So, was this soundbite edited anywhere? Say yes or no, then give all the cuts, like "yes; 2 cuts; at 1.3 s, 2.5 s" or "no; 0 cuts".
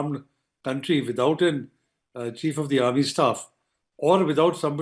no; 0 cuts